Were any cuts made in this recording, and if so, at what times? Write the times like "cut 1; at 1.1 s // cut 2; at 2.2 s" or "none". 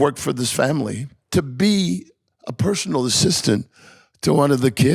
none